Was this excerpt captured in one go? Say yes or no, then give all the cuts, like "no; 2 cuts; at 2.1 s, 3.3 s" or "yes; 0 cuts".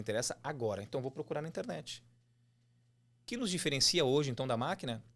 no; 1 cut; at 3.1 s